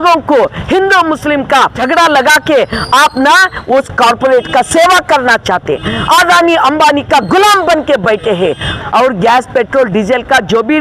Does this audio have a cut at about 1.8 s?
yes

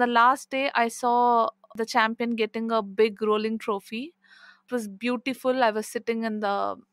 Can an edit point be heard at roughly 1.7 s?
yes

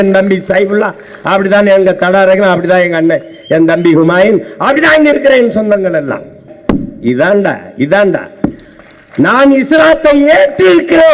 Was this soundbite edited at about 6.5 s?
yes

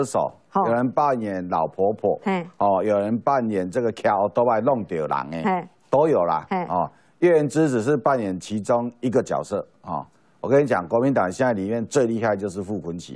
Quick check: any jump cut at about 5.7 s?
no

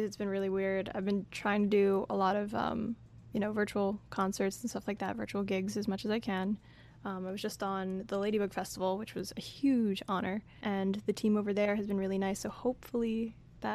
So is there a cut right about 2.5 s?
no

